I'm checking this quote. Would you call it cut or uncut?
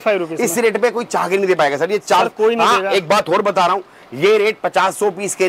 uncut